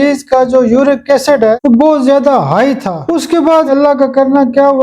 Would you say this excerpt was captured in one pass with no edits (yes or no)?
no